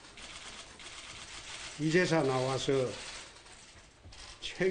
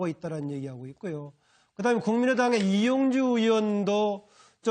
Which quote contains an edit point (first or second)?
first